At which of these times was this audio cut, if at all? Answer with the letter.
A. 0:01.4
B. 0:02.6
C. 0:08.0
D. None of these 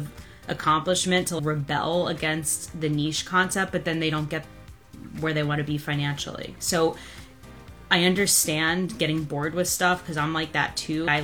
A